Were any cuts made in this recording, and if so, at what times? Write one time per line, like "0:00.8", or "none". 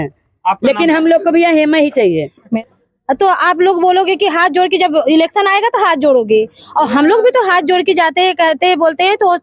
0:02.5